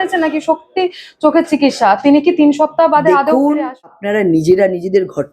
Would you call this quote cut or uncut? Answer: cut